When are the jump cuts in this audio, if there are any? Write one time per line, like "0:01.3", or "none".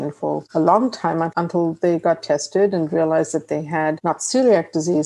none